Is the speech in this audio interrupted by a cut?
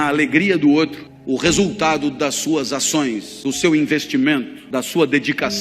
yes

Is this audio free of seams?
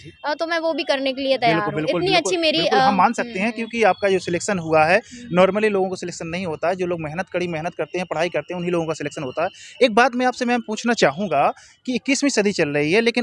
yes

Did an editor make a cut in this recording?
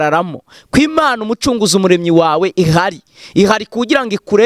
no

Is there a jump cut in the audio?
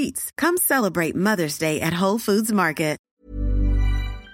yes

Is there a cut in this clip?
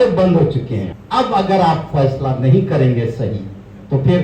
yes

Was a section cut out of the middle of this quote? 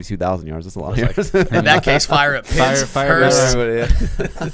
no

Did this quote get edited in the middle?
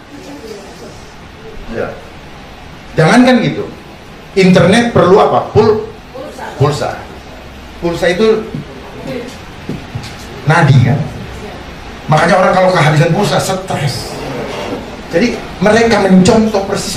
no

